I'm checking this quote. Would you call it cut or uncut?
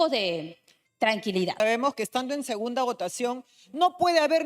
cut